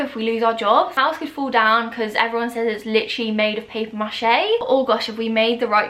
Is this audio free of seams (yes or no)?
no